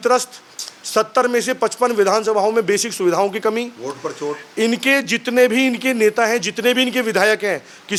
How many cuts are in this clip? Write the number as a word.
zero